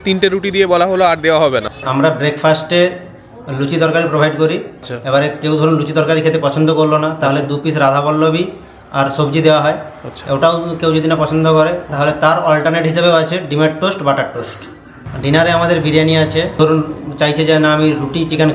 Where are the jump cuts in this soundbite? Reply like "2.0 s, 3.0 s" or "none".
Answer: 1.8 s, 4.7 s, 14.9 s, 16.6 s